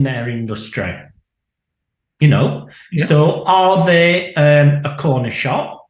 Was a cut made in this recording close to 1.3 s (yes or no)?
no